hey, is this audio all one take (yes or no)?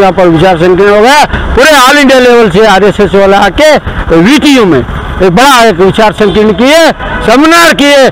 yes